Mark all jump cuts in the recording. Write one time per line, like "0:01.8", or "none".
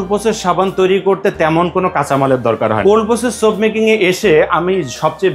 0:02.8